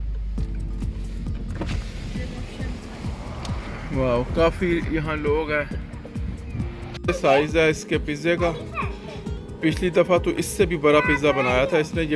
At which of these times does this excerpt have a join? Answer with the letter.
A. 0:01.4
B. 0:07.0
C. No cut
B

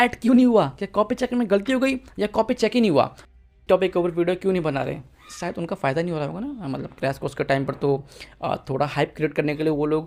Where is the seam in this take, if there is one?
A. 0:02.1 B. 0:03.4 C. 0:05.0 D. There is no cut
B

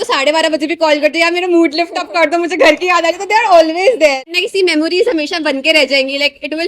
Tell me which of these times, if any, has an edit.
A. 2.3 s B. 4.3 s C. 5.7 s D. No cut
B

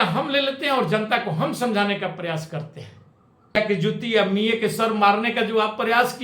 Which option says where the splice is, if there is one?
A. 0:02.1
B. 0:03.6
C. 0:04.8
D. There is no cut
B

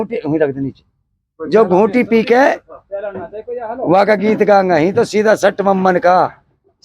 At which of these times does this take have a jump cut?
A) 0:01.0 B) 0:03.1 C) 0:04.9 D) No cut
D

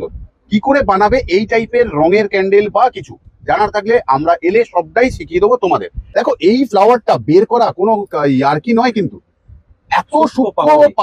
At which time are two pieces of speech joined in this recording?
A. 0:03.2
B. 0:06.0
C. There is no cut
B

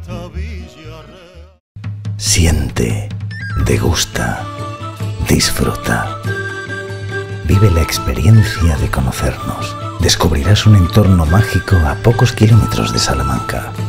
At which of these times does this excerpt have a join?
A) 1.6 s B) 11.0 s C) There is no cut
A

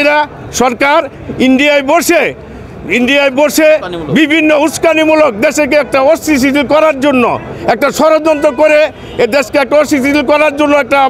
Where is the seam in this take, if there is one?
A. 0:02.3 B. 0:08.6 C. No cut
C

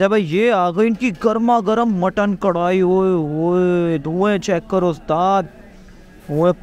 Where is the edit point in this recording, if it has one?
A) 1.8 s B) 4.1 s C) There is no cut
C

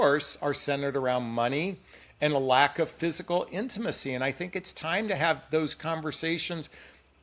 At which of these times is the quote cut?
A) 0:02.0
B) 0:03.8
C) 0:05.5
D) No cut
D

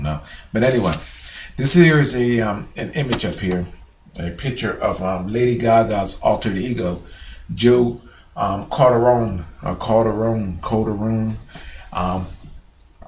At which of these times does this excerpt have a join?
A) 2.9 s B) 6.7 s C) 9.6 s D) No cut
B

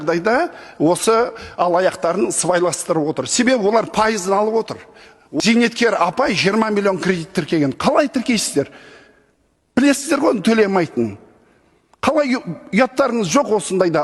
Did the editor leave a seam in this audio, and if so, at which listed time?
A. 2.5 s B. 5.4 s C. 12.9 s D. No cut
B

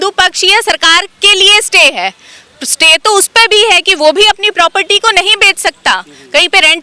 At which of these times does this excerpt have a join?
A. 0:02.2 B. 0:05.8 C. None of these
C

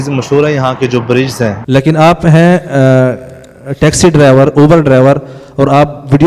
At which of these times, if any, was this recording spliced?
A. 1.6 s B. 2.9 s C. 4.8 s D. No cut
A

